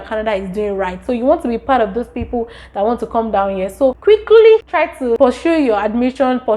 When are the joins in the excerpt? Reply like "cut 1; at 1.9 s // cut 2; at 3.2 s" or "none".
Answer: cut 1; at 4.0 s // cut 2; at 5.0 s